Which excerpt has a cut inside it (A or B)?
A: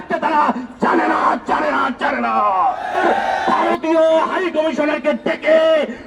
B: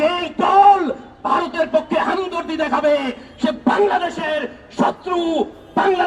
A